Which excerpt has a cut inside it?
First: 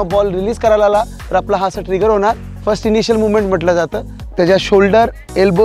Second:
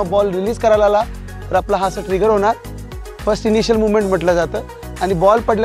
first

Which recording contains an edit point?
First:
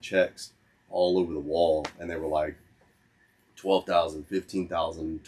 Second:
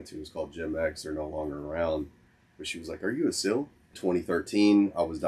second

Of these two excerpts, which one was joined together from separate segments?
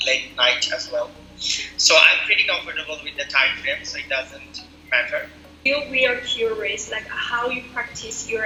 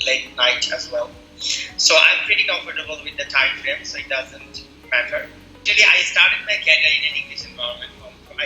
second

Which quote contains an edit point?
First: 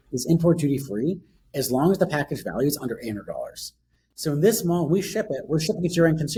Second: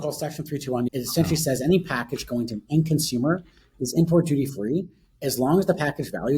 second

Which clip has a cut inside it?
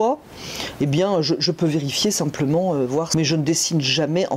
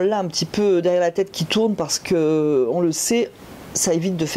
first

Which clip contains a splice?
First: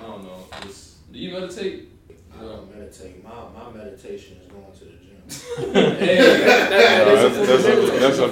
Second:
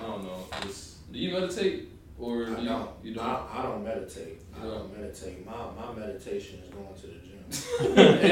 first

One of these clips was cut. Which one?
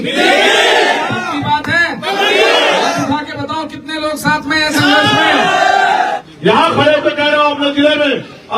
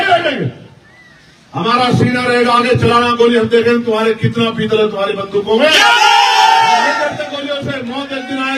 first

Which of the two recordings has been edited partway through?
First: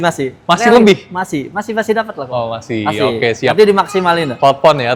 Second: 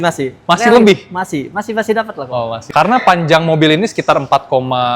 second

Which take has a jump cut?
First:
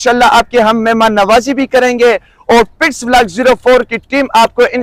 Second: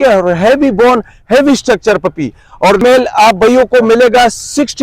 second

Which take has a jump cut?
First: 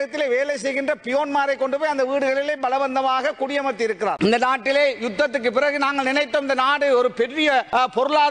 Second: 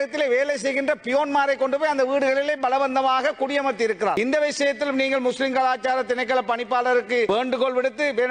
first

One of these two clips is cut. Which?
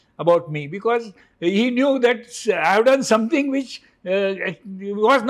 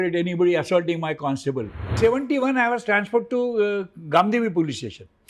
second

